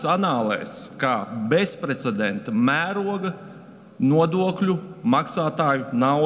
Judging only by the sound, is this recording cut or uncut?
uncut